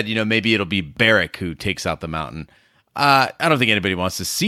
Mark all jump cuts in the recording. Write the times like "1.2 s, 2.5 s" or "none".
0.9 s